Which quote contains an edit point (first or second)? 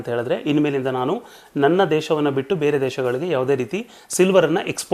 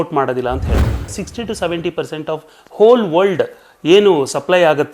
second